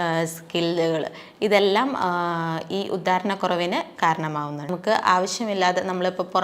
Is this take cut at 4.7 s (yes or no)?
yes